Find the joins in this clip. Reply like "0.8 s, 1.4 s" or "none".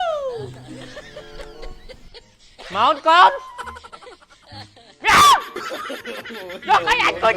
4.8 s